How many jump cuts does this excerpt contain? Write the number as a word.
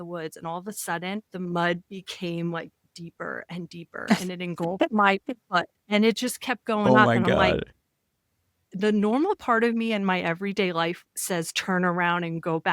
two